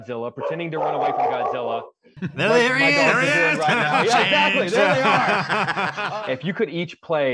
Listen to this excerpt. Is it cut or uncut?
cut